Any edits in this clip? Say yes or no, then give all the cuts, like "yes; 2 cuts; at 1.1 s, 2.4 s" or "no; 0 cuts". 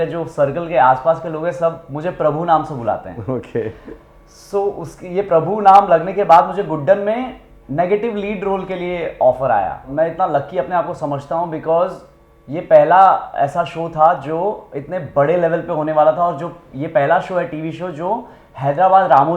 yes; 1 cut; at 9.9 s